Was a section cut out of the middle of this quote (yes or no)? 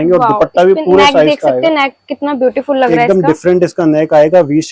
no